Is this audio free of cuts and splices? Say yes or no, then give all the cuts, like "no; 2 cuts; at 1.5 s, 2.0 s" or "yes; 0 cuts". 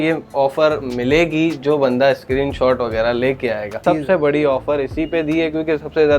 no; 1 cut; at 3.7 s